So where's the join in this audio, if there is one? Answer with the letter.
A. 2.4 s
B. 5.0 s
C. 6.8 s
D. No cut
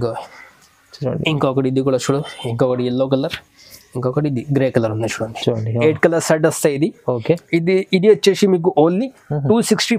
D